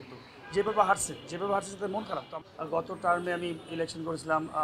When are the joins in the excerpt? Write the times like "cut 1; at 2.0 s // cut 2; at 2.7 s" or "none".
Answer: cut 1; at 2.3 s